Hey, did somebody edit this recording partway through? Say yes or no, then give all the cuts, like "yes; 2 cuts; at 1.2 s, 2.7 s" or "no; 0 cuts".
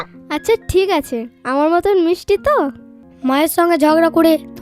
yes; 1 cut; at 3.0 s